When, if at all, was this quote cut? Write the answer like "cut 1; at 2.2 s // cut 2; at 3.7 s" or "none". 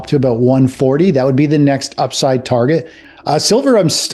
cut 1; at 3.0 s

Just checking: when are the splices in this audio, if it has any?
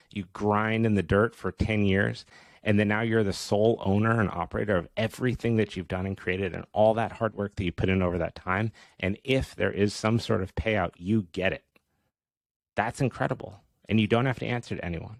none

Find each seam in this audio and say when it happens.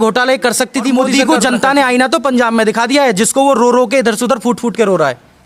cut 1; at 1.1 s

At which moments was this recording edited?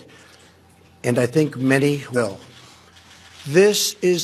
cut 1; at 2.2 s

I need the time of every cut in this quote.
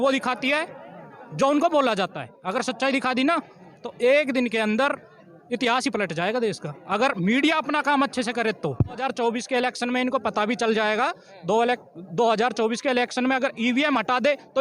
cut 1; at 9.0 s

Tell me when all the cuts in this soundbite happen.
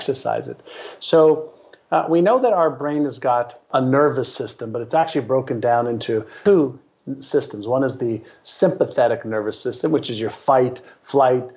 cut 1; at 3.7 s // cut 2; at 6.3 s

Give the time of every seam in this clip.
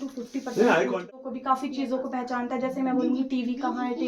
cut 1; at 1.1 s

